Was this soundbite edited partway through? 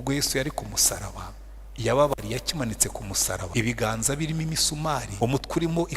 yes; 2 cuts; at 3.5 s, 5.1 s

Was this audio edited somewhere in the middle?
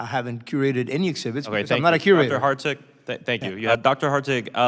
yes; 1 cut; at 3.7 s

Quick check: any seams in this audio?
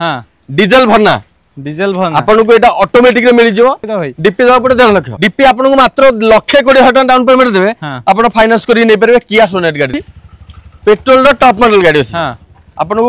yes; 2 cuts; at 3.9 s, 10.0 s

